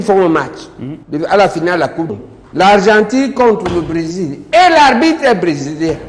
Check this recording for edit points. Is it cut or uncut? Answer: uncut